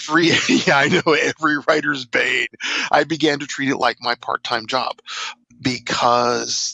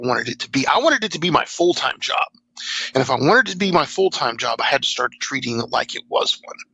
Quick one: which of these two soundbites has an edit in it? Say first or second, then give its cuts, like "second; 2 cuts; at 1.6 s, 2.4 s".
first; 1 cut; at 5.3 s